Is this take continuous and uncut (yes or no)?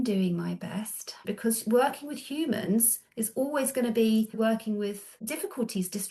no